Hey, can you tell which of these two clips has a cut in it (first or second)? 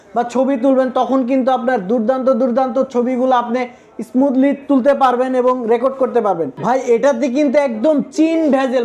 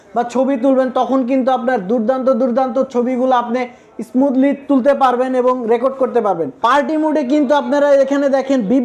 first